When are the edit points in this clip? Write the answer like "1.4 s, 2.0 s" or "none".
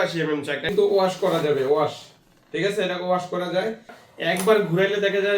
0.7 s, 4.0 s